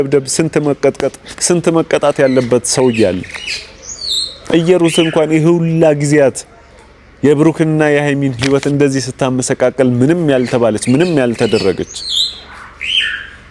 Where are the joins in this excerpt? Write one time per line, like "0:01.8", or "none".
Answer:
none